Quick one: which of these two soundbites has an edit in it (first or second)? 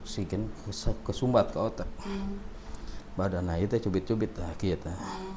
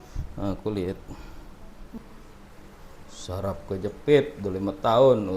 second